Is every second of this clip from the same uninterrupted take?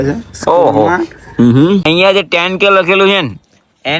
no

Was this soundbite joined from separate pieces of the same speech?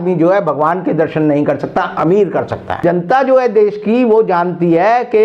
yes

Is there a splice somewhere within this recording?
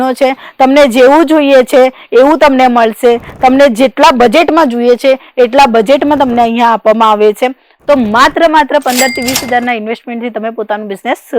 no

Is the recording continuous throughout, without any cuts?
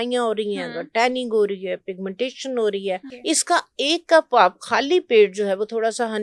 no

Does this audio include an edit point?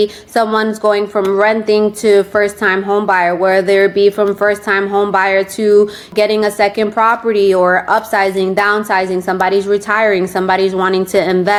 no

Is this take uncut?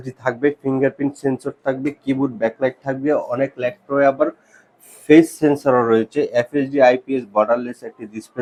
yes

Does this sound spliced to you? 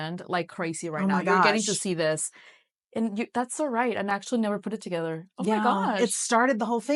no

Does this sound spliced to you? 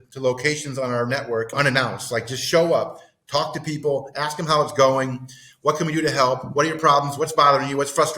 yes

